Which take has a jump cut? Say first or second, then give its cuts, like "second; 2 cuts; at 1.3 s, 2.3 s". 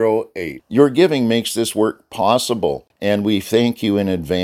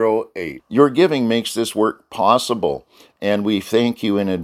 first; 1 cut; at 2.9 s